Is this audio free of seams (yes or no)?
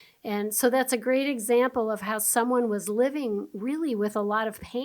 yes